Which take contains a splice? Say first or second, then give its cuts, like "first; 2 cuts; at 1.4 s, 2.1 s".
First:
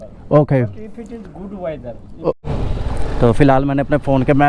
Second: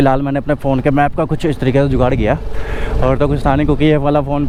first; 1 cut; at 2.4 s